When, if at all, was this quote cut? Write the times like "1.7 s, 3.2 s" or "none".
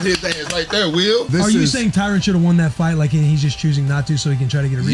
1.3 s